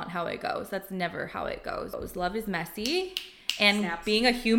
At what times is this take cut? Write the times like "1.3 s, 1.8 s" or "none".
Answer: 1.9 s